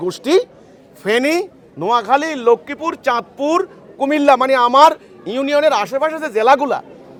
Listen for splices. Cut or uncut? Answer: uncut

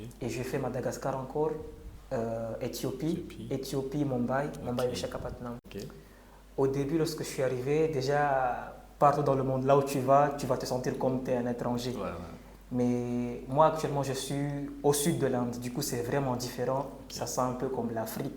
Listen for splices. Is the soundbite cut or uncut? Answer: cut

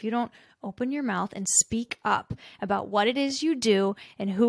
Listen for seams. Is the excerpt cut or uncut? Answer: uncut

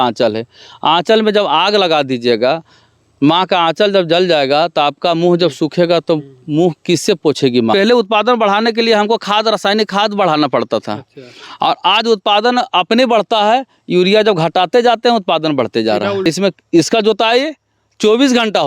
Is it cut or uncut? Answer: cut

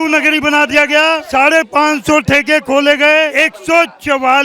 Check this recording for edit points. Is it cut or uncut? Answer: cut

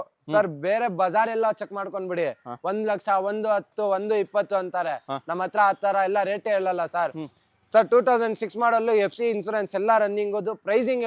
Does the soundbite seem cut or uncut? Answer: uncut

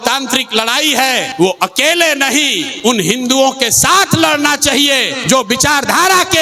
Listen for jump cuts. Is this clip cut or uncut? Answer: cut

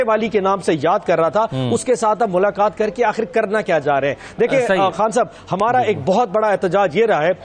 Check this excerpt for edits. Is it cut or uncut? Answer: uncut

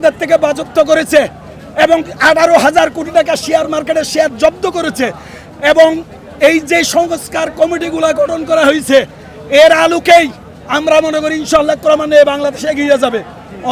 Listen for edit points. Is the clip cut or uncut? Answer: uncut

